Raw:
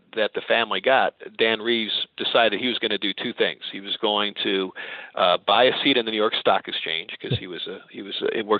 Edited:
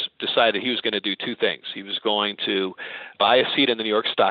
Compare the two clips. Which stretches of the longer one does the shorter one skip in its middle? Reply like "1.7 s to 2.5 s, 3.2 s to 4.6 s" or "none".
5.1 s to 5.4 s